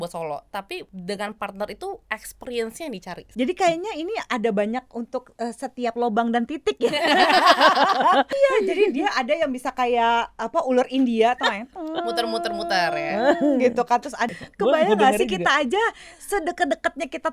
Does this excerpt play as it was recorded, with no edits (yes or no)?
no